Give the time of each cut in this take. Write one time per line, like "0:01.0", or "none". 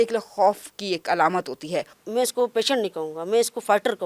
0:01.9